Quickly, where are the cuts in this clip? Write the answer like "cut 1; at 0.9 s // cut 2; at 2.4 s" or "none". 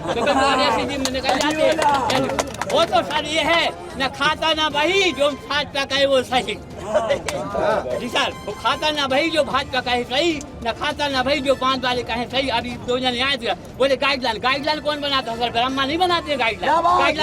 none